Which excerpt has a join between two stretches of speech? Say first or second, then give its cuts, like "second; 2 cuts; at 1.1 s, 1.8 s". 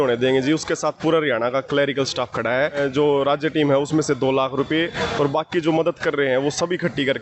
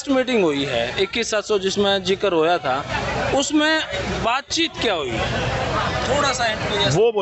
first; 1 cut; at 2.8 s